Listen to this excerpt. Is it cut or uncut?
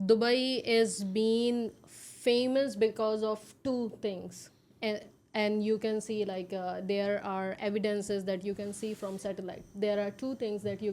uncut